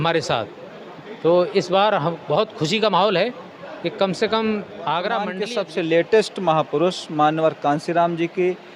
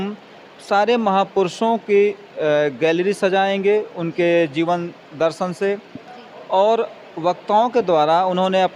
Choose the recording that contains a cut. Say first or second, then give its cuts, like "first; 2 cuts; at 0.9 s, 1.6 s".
first; 1 cut; at 5.4 s